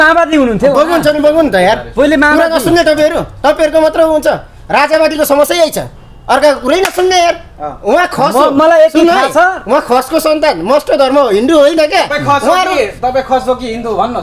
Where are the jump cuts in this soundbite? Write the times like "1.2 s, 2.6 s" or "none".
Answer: 7.7 s